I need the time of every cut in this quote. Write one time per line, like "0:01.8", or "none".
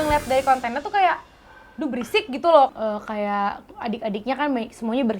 0:02.7